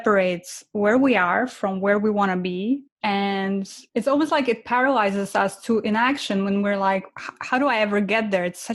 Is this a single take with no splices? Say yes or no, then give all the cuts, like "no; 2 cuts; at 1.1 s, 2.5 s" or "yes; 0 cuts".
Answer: no; 2 cuts; at 2.9 s, 3.8 s